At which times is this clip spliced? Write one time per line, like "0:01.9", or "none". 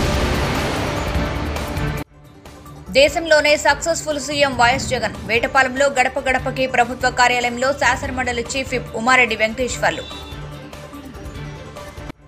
0:01.1